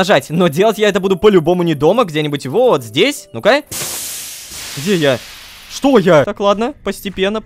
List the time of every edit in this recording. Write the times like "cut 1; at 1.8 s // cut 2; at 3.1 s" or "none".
cut 1; at 4.2 s // cut 2; at 6.3 s